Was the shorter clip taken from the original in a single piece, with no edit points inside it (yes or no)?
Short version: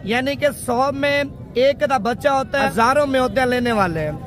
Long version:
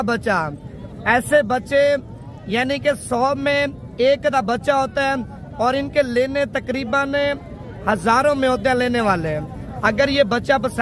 no